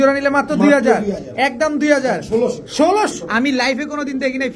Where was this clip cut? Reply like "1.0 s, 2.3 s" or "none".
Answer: 3.1 s